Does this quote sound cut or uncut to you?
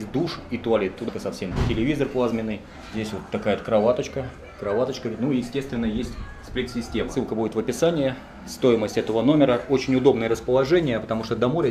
cut